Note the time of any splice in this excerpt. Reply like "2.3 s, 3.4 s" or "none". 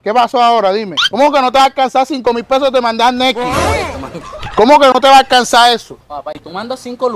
1.0 s